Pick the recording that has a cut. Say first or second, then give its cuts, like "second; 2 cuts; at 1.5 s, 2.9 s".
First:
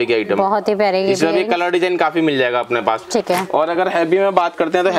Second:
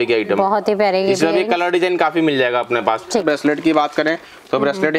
second; 1 cut; at 3.2 s